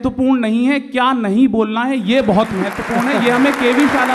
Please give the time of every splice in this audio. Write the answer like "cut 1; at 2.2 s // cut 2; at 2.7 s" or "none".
none